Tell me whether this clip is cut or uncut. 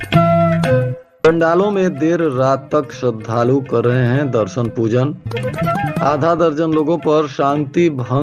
cut